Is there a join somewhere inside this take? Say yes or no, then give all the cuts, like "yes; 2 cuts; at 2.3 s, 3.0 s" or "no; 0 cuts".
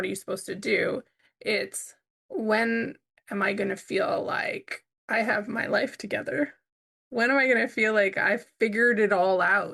no; 0 cuts